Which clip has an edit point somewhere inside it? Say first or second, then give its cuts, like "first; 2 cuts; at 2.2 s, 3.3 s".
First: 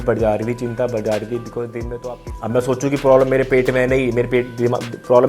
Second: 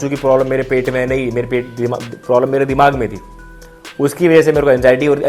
first; 1 cut; at 1.9 s